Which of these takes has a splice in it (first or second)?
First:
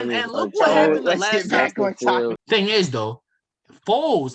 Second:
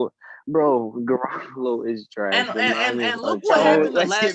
first